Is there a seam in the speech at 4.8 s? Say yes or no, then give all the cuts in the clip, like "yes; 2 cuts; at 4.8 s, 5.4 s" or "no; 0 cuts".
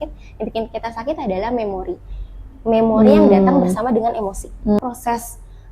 yes; 1 cut; at 4.8 s